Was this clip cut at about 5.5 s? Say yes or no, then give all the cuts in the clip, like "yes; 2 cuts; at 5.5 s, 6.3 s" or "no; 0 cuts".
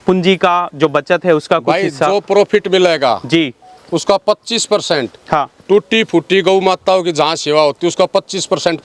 no; 0 cuts